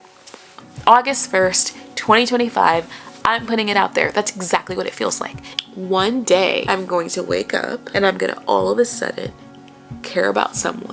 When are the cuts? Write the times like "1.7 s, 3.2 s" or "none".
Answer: 5.4 s, 6.6 s, 7.8 s